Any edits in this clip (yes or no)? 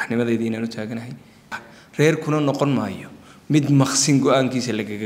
yes